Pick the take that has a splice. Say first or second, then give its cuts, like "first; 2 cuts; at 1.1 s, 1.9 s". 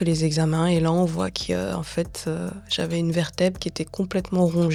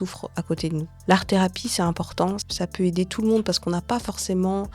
second; 2 cuts; at 0.9 s, 2.5 s